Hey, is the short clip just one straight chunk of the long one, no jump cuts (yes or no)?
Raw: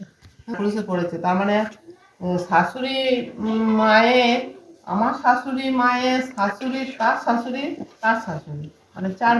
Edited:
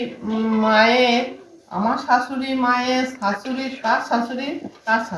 yes